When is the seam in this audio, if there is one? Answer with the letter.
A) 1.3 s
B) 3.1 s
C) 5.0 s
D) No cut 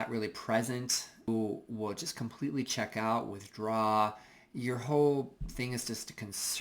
A